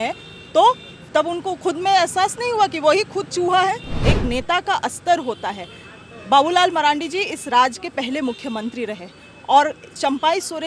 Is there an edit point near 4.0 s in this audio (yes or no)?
yes